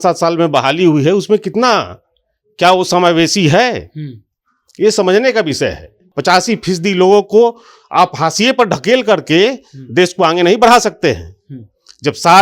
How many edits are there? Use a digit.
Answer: 1